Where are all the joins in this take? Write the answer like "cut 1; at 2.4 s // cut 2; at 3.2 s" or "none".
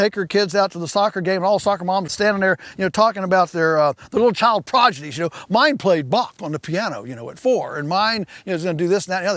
cut 1; at 2.1 s